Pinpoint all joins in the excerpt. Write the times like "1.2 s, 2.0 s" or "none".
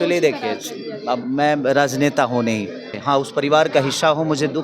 2.9 s